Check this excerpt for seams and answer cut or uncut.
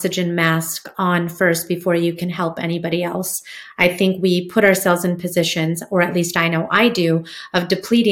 uncut